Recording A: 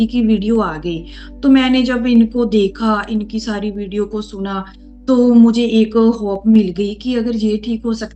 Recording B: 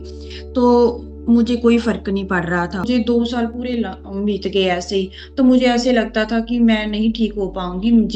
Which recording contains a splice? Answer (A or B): B